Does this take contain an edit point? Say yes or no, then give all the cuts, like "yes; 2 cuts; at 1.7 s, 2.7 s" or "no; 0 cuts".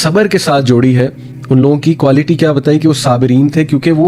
no; 0 cuts